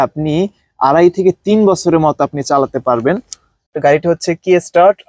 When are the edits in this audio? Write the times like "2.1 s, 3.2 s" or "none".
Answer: 3.6 s